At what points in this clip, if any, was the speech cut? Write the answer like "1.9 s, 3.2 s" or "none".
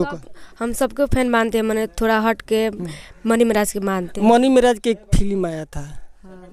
none